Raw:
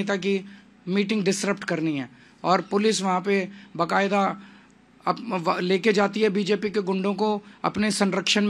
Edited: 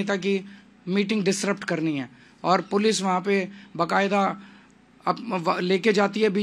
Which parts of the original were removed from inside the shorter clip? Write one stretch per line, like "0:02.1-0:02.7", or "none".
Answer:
none